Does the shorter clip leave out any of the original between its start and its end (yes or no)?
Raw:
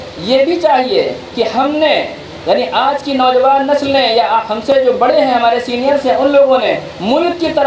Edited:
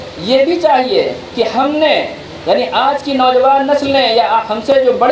no